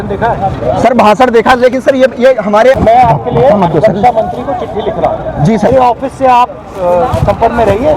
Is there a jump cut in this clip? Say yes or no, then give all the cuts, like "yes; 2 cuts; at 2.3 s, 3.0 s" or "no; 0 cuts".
yes; 2 cuts; at 2.8 s, 5.7 s